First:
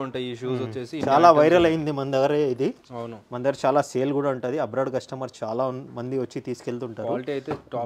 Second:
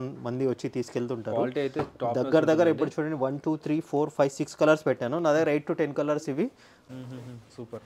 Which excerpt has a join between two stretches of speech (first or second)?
second